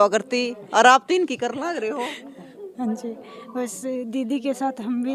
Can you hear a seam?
no; 0 cuts

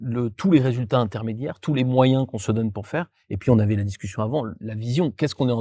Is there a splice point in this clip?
no; 0 cuts

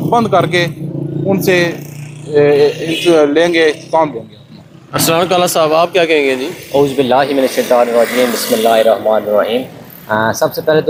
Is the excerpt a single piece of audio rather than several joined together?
yes; 0 cuts

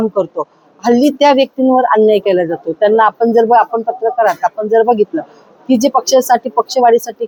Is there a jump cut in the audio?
no; 0 cuts

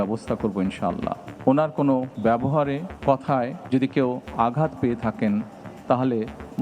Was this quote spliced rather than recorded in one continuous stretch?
yes; 3 cuts; at 1.3 s, 2.5 s, 3.6 s

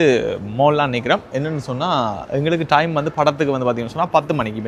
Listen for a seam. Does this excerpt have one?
no; 0 cuts

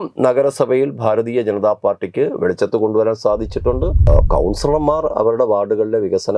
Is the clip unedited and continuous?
no; 1 cut; at 4.1 s

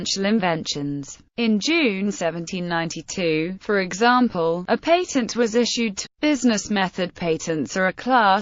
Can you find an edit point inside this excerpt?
no; 0 cuts

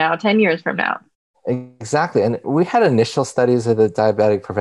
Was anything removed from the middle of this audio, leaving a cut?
yes; 1 cut; at 2.4 s

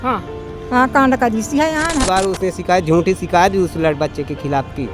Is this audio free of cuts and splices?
no; 1 cut; at 2.0 s

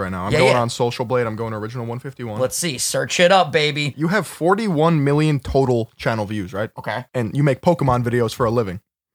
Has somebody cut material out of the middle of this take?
yes; 2 cuts; at 3.9 s, 7.1 s

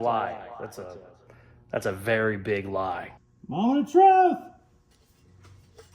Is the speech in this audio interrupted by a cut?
yes; 1 cut; at 3.2 s

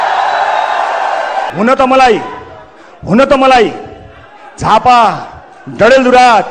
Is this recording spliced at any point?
yes; 1 cut; at 1.5 s

